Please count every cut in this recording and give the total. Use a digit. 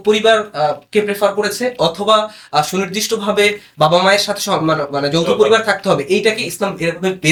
0